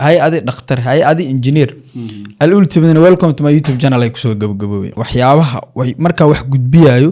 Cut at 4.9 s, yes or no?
yes